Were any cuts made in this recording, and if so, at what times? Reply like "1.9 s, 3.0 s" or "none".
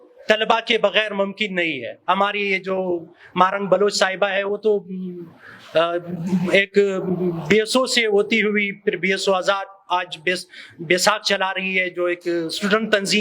1.9 s